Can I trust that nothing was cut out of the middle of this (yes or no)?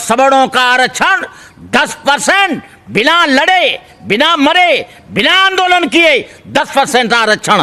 yes